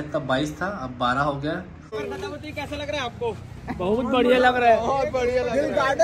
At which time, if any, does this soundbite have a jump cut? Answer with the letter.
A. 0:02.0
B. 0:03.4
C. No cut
A